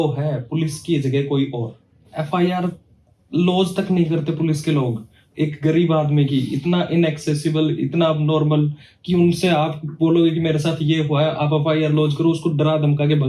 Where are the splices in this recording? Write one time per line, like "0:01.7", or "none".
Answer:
0:02.1